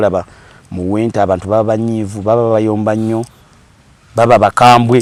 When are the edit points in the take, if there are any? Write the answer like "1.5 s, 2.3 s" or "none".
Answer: none

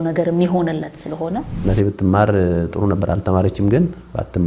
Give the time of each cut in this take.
1.5 s

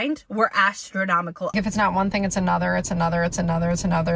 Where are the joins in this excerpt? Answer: 1.5 s

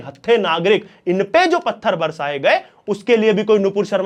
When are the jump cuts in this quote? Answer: none

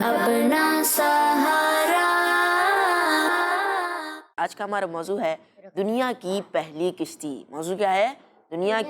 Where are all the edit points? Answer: 4.3 s

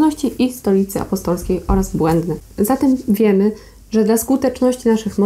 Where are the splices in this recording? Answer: none

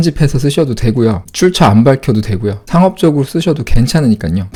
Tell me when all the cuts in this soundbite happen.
none

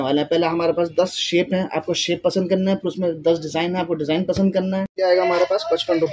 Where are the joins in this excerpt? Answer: 4.9 s

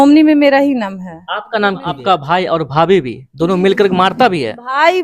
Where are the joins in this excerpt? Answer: 2.0 s

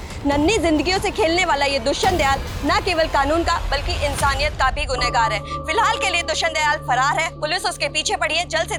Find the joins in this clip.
none

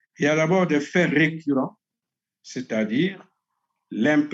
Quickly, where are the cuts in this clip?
none

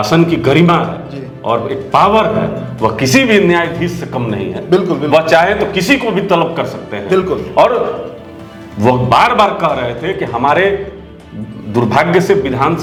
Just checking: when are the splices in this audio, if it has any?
none

